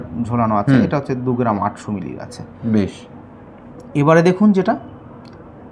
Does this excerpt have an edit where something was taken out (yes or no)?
no